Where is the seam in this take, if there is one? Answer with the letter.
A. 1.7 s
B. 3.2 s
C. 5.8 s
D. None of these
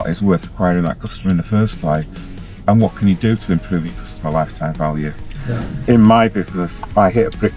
C